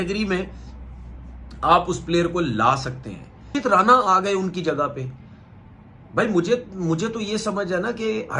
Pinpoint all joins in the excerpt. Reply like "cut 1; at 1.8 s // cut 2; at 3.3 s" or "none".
cut 1; at 3.5 s